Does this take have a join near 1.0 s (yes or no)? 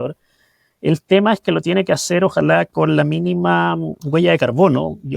no